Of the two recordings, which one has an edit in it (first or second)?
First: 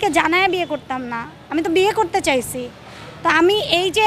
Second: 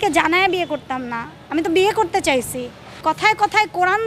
second